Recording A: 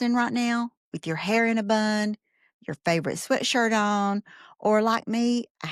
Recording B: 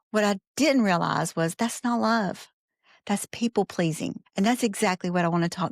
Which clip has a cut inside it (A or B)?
B